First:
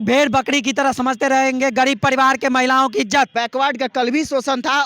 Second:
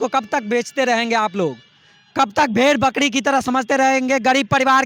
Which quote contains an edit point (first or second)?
first